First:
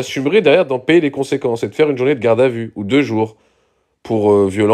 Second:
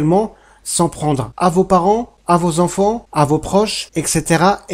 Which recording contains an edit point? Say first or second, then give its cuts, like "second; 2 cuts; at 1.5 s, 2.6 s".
second; 4 cuts; at 1.3 s, 2.1 s, 3.1 s, 3.8 s